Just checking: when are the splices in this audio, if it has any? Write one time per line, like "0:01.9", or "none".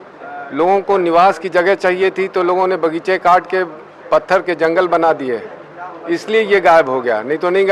none

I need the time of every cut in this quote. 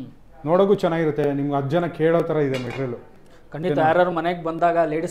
none

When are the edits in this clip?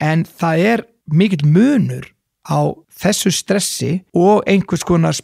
0:01.0
0:02.9
0:04.0

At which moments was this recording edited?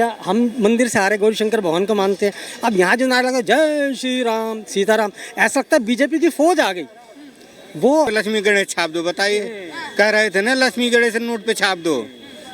0:08.1

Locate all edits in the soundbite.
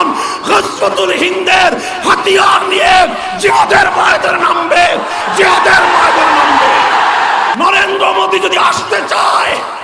0:07.6

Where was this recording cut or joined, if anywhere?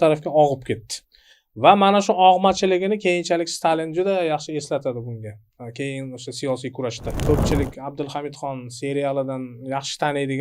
0:07.3

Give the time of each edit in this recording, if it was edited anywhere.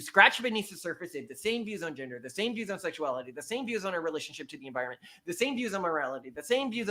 none

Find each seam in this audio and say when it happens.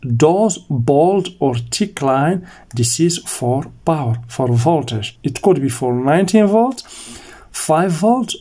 0:05.1

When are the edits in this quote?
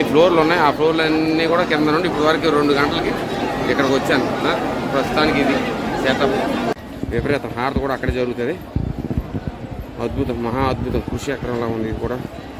0:06.7

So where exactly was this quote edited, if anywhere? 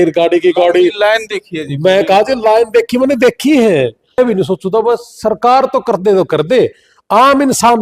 0:04.2

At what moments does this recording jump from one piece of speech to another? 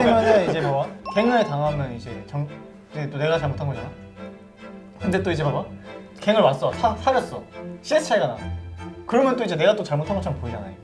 0:01.0

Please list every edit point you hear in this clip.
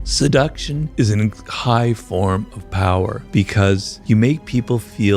0:00.9
0:03.5

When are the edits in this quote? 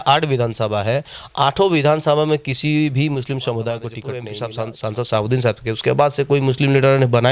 0:04.2

